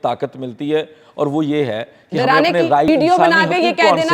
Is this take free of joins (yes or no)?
no